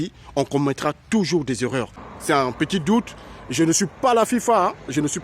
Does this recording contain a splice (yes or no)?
yes